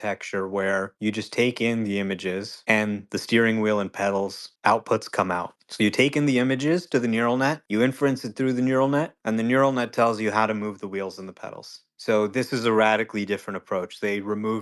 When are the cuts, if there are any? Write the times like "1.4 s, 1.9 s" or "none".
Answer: none